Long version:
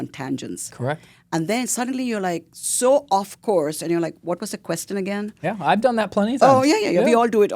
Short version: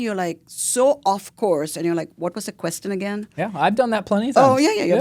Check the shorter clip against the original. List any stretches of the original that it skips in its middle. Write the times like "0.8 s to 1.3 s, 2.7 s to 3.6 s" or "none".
none